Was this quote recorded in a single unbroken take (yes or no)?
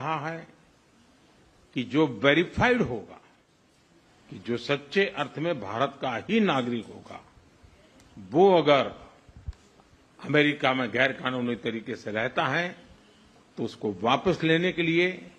yes